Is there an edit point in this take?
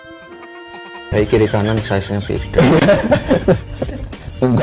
yes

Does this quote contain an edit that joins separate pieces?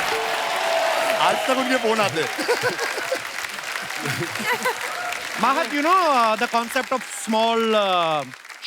yes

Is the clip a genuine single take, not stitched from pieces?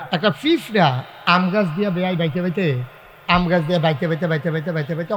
yes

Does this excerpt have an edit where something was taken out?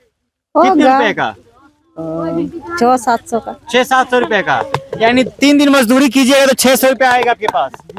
no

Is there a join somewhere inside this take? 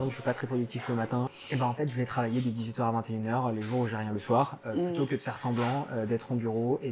yes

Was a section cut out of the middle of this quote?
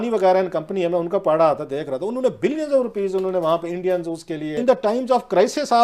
yes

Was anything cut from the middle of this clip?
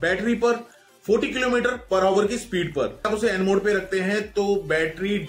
yes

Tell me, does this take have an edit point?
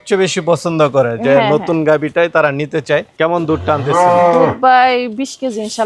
yes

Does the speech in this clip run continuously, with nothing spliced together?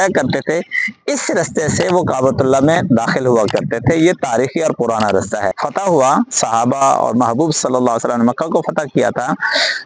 no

